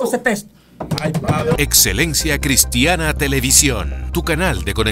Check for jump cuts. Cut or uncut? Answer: cut